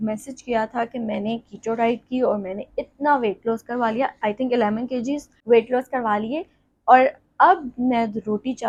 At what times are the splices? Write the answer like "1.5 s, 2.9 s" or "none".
none